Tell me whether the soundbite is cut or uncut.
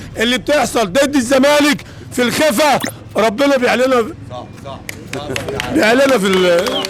uncut